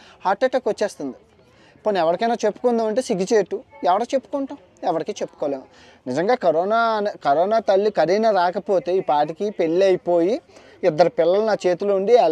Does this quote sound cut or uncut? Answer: uncut